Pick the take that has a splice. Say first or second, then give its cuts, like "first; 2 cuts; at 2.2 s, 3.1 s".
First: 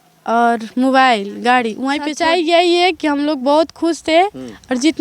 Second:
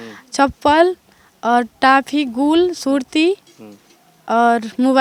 first; 1 cut; at 2.1 s